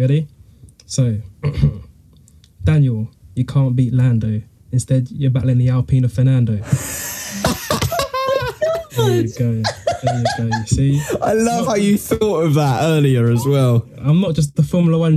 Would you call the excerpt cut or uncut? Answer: uncut